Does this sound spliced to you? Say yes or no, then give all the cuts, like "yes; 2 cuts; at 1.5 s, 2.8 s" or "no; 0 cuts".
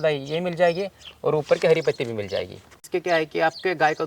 yes; 1 cut; at 2.8 s